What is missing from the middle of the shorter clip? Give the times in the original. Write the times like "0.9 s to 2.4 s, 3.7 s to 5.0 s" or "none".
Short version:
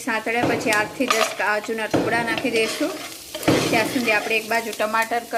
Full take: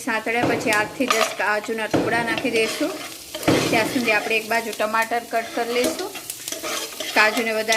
none